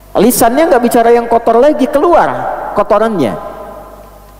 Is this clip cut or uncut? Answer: uncut